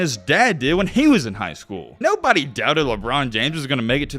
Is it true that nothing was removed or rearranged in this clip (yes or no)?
no